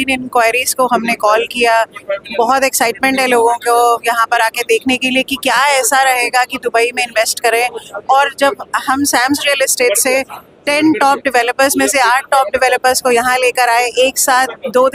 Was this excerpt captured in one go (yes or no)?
yes